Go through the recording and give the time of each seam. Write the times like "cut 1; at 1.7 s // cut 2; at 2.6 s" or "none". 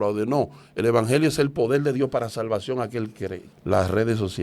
cut 1; at 3.5 s